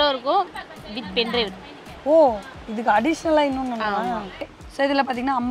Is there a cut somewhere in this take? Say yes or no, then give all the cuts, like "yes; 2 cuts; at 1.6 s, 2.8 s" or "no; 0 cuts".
yes; 1 cut; at 4.6 s